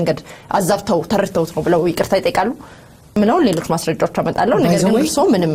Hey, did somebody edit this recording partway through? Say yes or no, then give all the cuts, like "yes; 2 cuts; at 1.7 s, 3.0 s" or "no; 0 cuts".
yes; 1 cut; at 3.1 s